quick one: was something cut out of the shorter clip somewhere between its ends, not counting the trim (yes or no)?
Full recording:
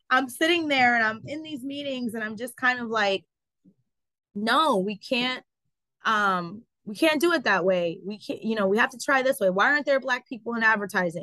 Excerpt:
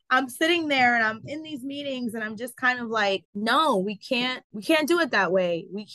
yes